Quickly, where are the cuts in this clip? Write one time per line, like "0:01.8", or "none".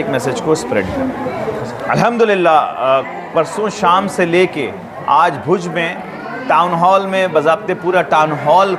none